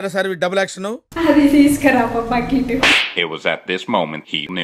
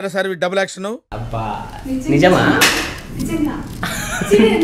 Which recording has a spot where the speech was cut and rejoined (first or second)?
first